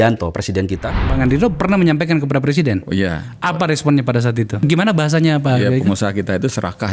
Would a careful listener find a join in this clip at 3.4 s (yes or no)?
no